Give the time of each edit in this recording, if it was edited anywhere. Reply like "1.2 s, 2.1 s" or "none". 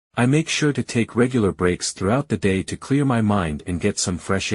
2.8 s